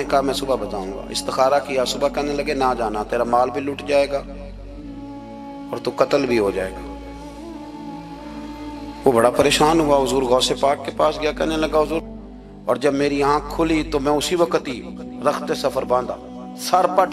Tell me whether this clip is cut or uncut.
cut